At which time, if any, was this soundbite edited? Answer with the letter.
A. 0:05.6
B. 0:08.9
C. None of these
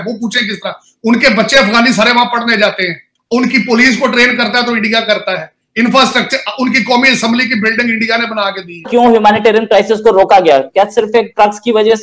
B